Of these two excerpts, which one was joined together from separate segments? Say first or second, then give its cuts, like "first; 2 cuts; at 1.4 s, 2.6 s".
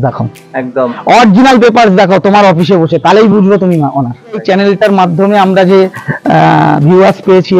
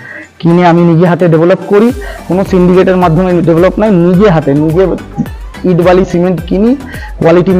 first; 1 cut; at 4.4 s